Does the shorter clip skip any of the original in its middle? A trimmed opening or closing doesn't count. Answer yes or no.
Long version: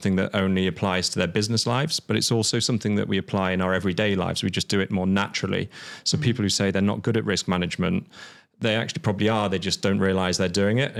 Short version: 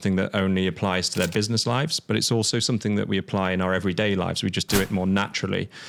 no